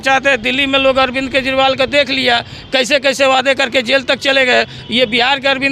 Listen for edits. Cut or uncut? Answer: uncut